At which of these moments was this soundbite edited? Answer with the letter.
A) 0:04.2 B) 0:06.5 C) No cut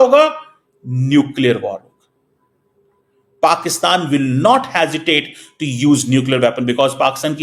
C